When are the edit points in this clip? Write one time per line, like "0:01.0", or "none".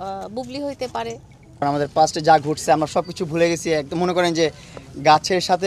0:01.6

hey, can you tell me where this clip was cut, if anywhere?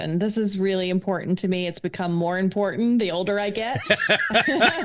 none

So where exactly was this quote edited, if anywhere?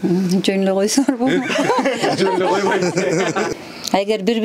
0:03.5

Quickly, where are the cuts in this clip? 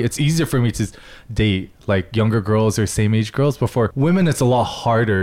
0:03.9

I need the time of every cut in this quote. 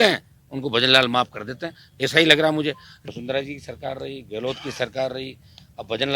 0:02.9

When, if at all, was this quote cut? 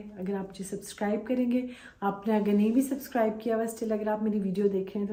none

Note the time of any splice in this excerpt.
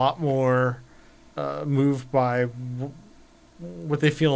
none

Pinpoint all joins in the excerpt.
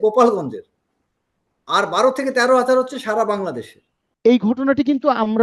0:04.0

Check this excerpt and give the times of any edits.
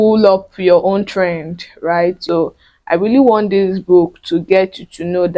0:02.2

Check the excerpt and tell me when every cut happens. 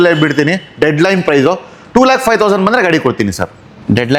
none

